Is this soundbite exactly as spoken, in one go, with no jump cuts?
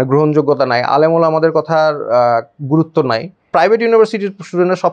no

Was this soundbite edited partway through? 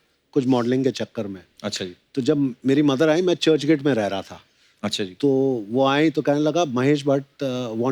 no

